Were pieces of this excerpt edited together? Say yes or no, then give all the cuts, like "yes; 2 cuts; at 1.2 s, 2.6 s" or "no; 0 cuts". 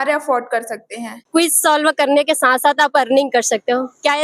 yes; 1 cut; at 1.3 s